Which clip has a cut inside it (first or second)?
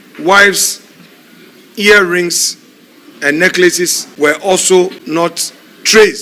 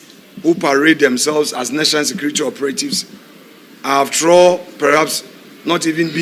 first